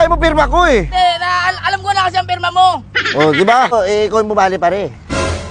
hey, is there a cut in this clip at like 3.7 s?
yes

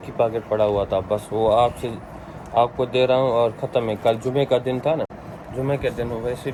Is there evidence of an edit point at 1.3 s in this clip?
no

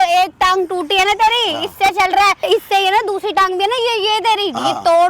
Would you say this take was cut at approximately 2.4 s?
yes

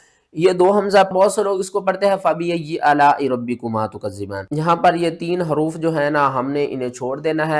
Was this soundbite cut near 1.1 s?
yes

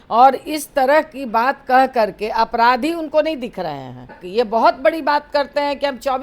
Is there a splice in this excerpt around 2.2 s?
no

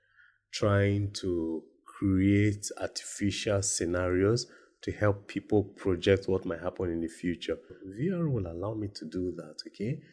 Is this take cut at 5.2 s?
no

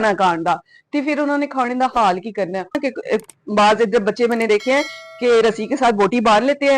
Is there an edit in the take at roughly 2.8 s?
yes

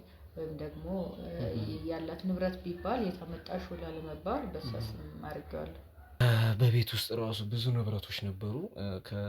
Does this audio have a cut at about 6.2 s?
yes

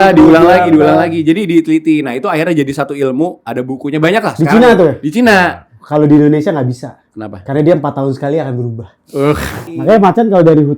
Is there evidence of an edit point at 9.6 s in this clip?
yes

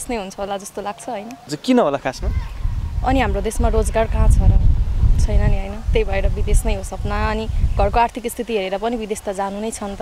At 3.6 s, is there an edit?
no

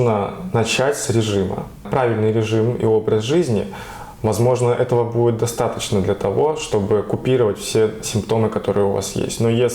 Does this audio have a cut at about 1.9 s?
yes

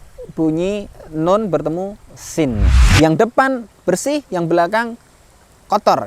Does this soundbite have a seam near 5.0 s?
no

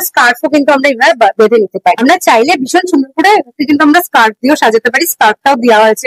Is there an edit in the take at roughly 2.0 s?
no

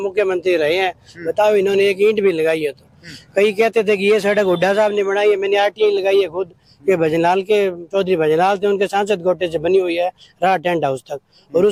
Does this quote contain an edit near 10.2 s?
no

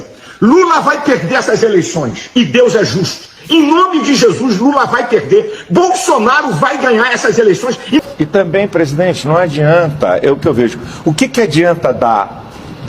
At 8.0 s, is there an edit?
yes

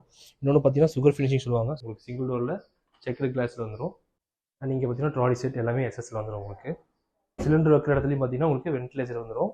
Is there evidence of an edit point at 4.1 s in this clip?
yes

